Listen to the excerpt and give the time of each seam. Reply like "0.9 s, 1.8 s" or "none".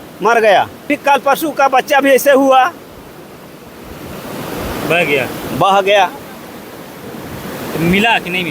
0.9 s